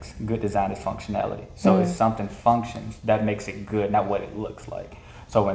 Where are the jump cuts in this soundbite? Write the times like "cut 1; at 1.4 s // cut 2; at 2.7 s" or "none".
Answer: none